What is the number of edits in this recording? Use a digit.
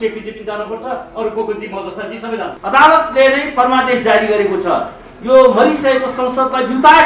1